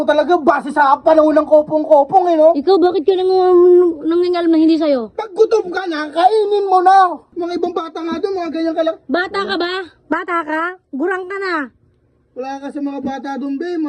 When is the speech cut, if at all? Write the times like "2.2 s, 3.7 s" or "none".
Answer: 7.3 s